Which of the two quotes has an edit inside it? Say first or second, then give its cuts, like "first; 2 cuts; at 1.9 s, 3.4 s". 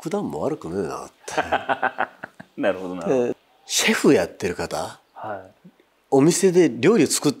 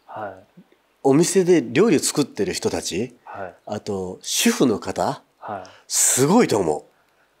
first; 1 cut; at 3.3 s